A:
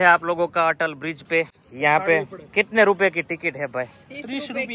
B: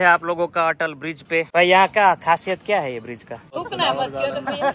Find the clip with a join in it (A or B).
B